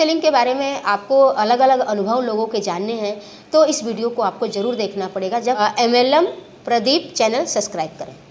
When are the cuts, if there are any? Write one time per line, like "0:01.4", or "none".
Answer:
0:05.6